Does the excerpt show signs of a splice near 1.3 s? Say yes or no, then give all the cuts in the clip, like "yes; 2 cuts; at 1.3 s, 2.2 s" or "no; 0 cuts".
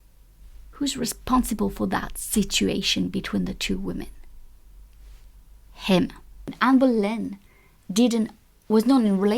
no; 1 cut; at 6.4 s